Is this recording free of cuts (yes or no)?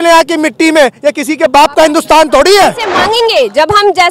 no